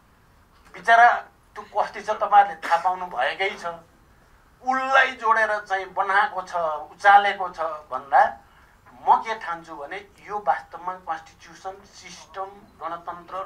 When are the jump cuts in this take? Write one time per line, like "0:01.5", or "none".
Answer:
none